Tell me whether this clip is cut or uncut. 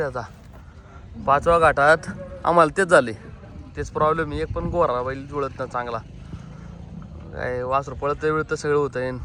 uncut